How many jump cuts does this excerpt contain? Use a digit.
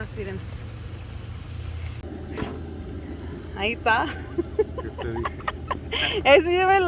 1